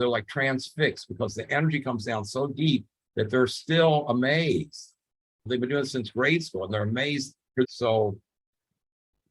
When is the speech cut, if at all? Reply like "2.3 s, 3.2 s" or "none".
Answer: 7.7 s